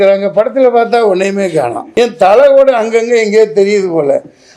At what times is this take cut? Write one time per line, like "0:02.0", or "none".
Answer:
0:01.8